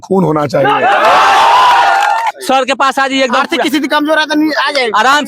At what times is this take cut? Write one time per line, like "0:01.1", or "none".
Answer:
0:02.4